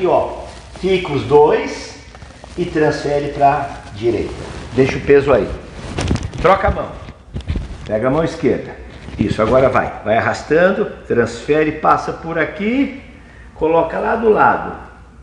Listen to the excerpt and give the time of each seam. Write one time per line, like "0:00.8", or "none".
none

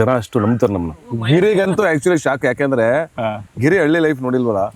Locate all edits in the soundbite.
0:01.1

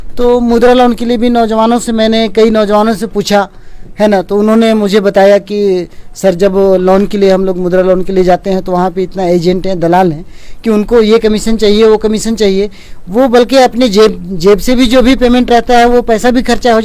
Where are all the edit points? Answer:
none

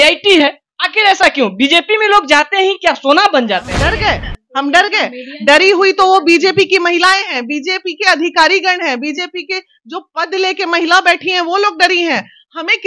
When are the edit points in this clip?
0:03.9

